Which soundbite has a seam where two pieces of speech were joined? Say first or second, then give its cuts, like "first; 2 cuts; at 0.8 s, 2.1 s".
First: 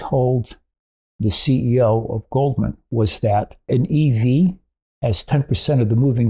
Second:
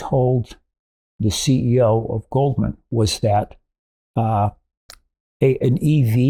first; 1 cut; at 3.7 s